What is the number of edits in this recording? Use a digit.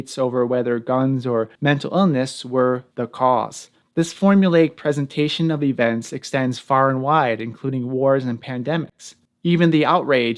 2